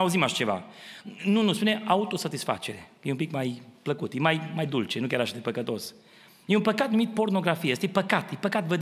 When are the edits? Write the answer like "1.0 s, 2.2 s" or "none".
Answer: none